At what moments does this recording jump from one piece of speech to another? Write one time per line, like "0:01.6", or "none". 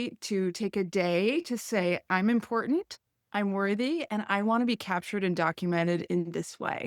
none